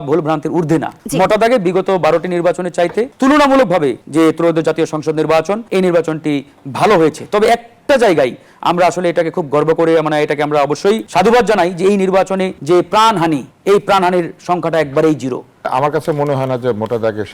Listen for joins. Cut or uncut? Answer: cut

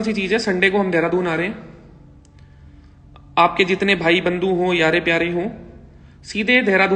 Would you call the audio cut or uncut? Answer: uncut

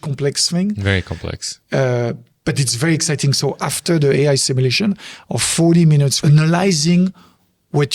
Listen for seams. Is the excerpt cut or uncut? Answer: cut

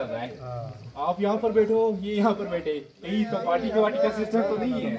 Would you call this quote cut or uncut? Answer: uncut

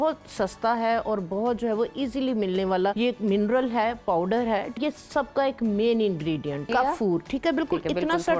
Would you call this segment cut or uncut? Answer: cut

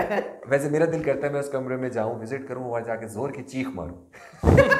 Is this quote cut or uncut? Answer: uncut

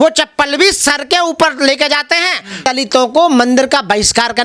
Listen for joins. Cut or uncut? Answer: cut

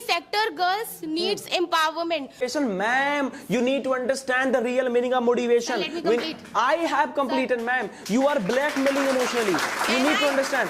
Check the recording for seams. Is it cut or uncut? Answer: cut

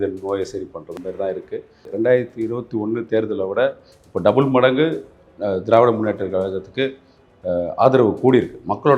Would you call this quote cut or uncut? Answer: cut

